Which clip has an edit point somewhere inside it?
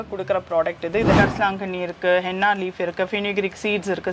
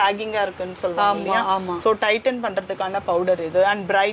first; 1 cut; at 1.1 s

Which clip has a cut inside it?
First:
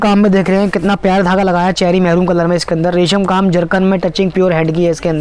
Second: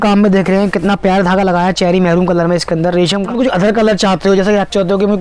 second; 1 cut; at 3.2 s

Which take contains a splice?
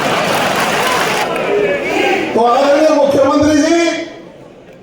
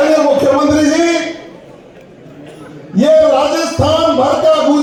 first; 1 cut; at 1.2 s

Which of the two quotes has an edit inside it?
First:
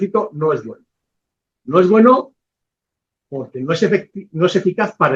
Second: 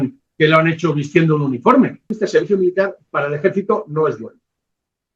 second; 1 cut; at 2.2 s

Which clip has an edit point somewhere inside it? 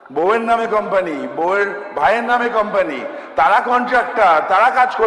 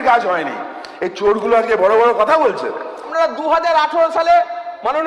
second; 1 cut; at 3.1 s

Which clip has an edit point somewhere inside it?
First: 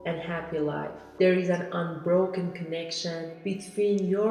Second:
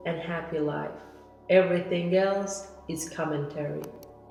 first; 1 cut; at 1.1 s

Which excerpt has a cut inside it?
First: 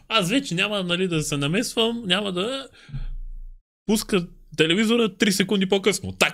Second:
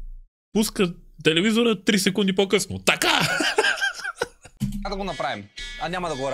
second; 1 cut; at 4.4 s

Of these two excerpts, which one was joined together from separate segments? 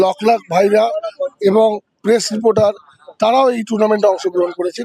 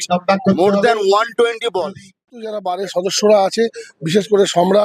second; 1 cut; at 2.6 s

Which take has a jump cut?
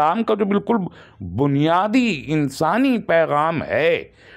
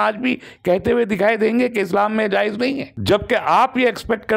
second; 1 cut; at 2.9 s

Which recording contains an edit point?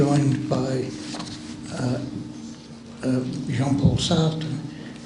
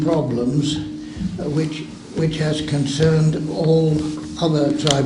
second; 1 cut; at 1.0 s

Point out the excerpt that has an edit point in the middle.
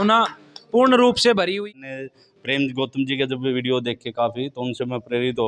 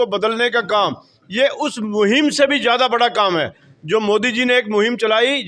first; 1 cut; at 1.6 s

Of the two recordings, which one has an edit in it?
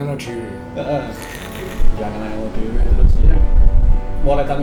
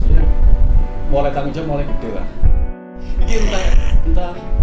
second; 1 cut; at 2.8 s

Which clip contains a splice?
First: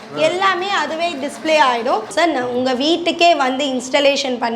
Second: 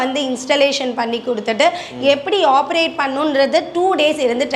first; 1 cut; at 2.1 s

